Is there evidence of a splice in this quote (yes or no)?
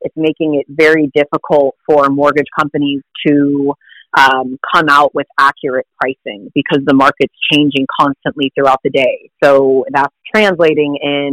yes